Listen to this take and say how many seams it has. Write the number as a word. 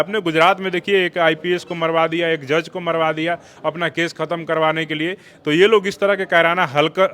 zero